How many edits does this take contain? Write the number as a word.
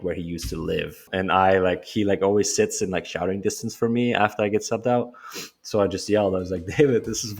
one